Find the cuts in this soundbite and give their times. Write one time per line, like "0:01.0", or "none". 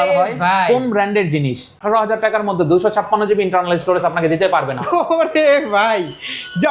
0:01.8